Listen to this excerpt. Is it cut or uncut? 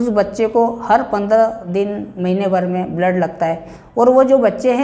cut